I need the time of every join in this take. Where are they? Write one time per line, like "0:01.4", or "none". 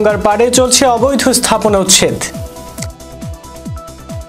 0:02.3

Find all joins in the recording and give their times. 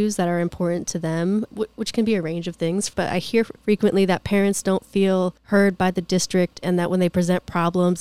0:01.5
0:03.2
0:05.4

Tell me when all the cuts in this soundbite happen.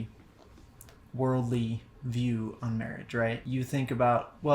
0:03.4

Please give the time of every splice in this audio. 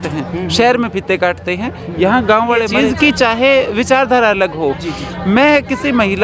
0:02.7

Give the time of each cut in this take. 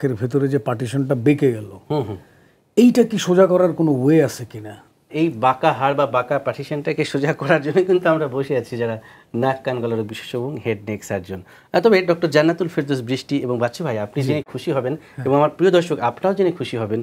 none

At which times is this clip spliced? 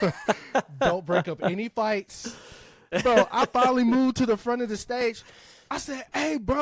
0:02.8

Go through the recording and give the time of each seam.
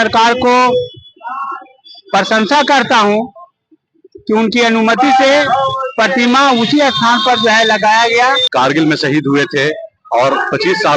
0:08.4

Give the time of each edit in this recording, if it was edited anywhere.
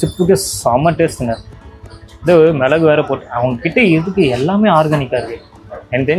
none

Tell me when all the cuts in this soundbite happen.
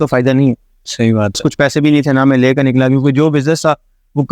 0:01.4

